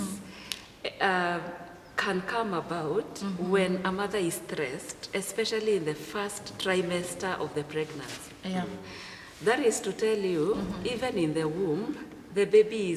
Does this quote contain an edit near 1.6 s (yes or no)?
no